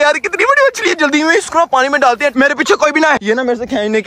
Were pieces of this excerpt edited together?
yes; 2 cuts; at 2.3 s, 3.2 s

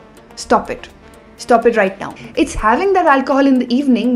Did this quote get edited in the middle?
yes; 1 cut; at 2.2 s

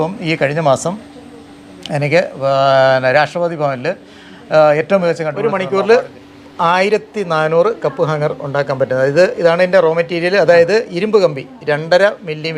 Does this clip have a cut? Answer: yes; 1 cut; at 5.4 s

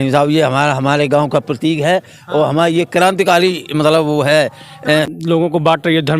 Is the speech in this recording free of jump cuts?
no; 1 cut; at 5.1 s

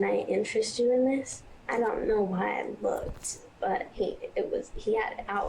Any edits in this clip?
yes; 2 cuts; at 1.5 s, 4.0 s

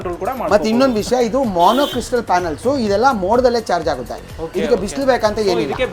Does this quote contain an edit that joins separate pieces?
no; 0 cuts

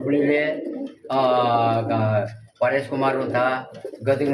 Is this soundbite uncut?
yes; 0 cuts

